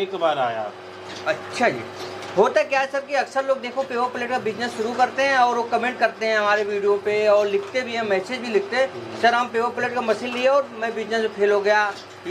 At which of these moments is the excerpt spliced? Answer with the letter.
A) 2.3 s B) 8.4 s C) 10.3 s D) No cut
D